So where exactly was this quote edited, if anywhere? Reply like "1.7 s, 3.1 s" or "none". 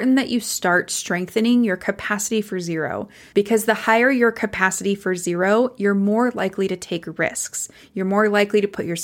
3.2 s

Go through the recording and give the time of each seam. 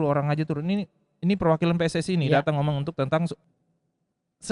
3.4 s

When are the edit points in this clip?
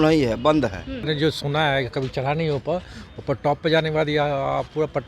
1.1 s

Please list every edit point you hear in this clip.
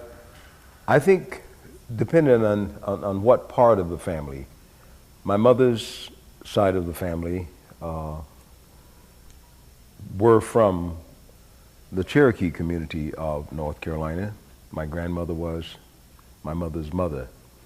3.2 s

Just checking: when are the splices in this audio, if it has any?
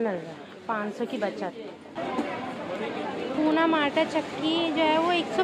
2.0 s

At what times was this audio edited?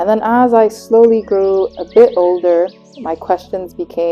none

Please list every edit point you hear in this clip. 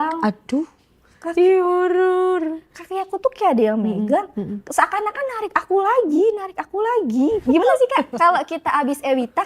7.4 s

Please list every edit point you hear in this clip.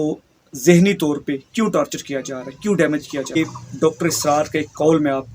3.4 s

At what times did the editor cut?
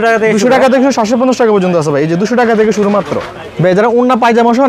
3.4 s

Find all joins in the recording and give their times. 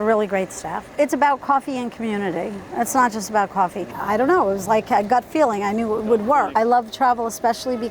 0.9 s, 3.9 s, 6.5 s

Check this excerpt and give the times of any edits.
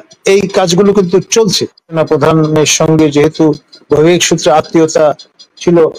1.9 s

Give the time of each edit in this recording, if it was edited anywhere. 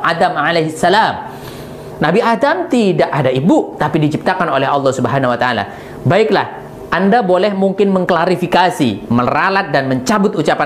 none

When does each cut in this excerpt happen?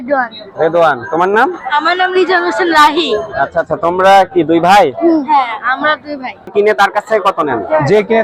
6.5 s

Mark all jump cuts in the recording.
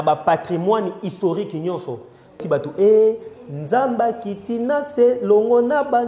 2.4 s

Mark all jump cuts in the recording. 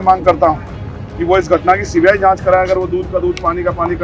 none

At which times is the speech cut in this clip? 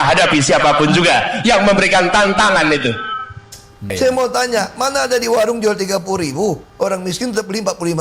3.9 s

